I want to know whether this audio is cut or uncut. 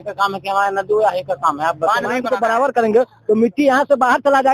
cut